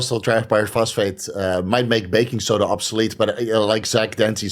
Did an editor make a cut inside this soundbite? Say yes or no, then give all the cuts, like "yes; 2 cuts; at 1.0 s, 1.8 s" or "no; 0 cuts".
no; 0 cuts